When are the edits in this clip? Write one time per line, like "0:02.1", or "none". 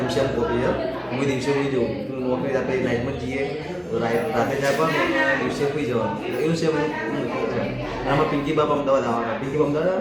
none